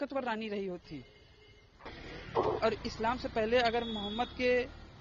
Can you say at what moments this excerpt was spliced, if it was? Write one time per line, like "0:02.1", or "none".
0:01.9